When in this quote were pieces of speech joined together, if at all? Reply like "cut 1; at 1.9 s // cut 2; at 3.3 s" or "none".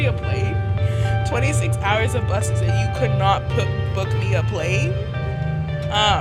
none